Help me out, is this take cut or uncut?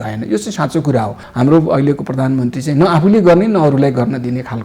cut